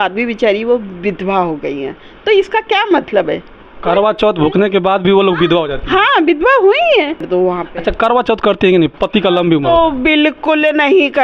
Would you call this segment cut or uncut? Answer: cut